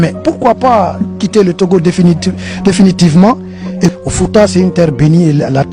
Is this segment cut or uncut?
cut